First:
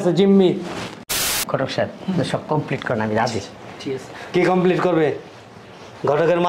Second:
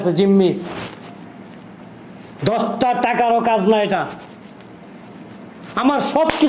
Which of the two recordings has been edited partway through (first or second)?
first